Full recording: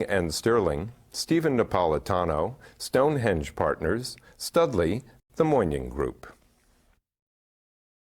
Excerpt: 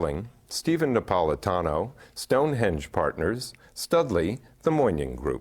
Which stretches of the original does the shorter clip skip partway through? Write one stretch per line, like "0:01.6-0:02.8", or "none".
0:05.1-0:05.2